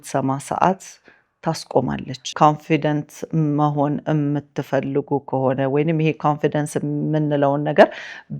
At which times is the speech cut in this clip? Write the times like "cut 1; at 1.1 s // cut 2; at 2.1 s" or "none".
cut 1; at 2.3 s